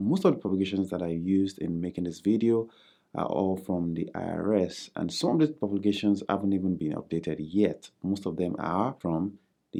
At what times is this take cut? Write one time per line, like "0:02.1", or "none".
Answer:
none